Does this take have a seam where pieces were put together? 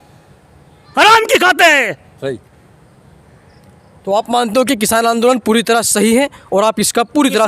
no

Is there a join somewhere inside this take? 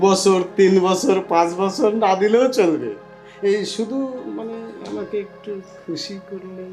no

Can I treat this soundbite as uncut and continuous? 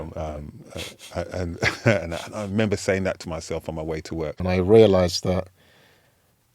no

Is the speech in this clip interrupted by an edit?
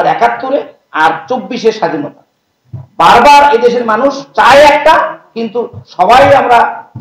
no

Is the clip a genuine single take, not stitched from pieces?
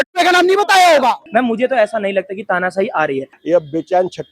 no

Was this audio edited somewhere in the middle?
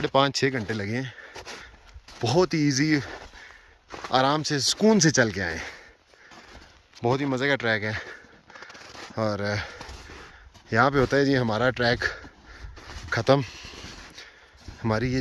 no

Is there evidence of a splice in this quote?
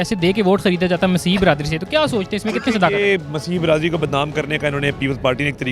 no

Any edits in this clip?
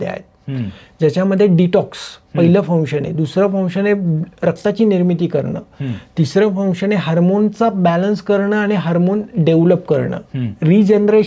no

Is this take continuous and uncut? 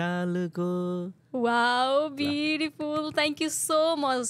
yes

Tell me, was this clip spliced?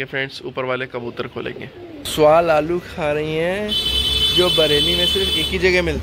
yes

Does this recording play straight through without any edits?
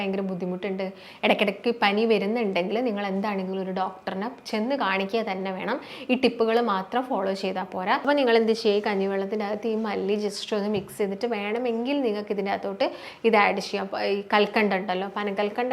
no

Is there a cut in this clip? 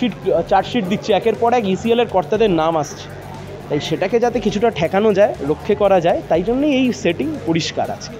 no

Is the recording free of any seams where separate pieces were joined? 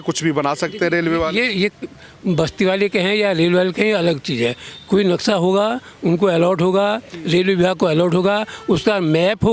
yes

